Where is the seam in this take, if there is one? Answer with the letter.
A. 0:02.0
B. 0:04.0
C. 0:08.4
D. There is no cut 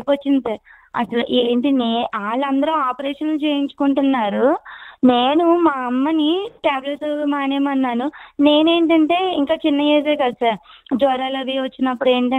D